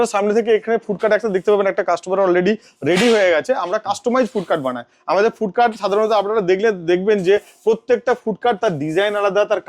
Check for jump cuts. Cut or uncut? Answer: uncut